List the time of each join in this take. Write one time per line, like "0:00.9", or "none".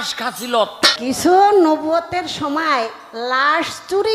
0:01.0